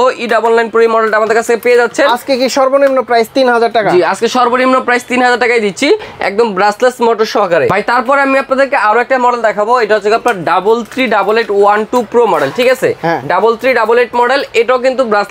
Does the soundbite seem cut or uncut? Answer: uncut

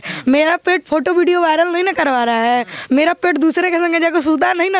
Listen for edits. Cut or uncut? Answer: uncut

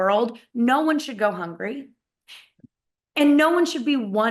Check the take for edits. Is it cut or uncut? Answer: uncut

